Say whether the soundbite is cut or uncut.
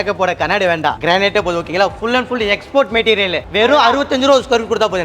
cut